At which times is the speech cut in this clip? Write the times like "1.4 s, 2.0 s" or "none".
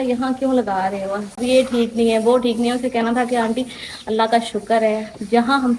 1.4 s